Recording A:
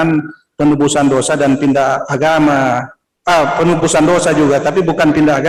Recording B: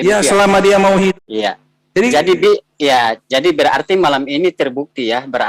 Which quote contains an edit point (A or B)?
B